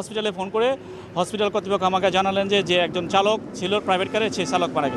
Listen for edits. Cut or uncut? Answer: uncut